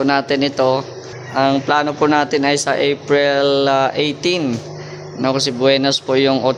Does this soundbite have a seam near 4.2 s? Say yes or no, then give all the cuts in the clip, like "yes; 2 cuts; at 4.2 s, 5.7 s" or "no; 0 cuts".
no; 0 cuts